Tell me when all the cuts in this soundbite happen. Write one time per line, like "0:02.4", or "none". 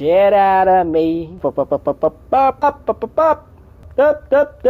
0:01.4
0:02.6
0:03.8

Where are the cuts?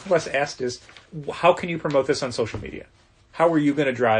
0:01.1

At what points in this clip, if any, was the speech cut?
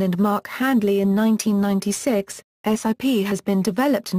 0:00.9

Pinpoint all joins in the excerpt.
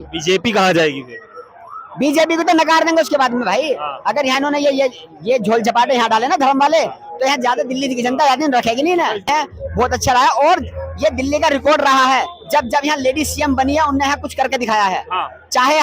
0:09.3

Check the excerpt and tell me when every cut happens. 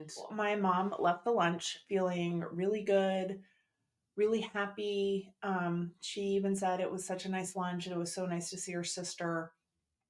none

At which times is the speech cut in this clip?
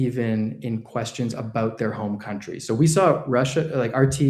none

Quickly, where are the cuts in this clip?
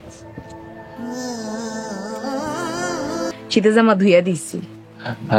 0:03.3

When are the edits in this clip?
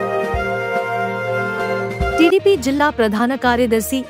0:02.2

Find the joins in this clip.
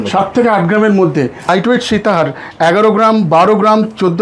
0:01.5

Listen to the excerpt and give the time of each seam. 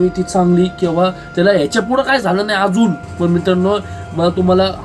0:03.1

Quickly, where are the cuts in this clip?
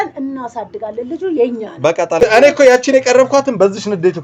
0:02.2

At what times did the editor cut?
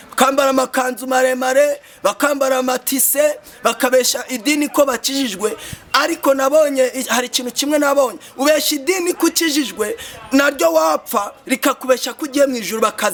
none

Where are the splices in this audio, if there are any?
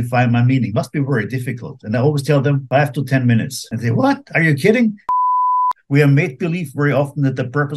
0:02.6
0:03.6
0:05.4

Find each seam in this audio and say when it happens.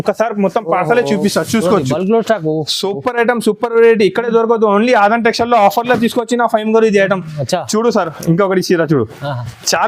none

